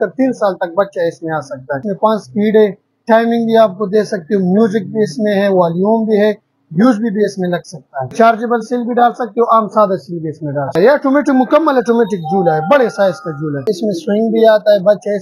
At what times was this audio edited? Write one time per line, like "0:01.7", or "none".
0:01.8
0:08.1
0:10.8
0:13.6

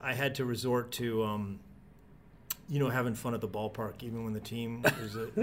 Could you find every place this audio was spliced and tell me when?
none

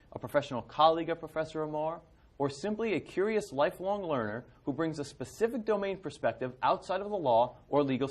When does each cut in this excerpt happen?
0:01.7

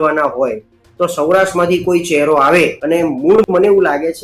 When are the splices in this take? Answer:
0:02.8

